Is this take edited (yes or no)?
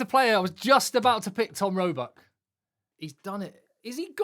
yes